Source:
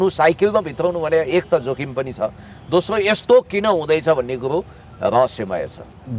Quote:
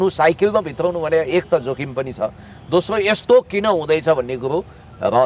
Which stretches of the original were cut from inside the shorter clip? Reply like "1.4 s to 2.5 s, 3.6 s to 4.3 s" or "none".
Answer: none